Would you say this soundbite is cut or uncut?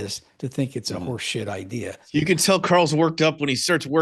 cut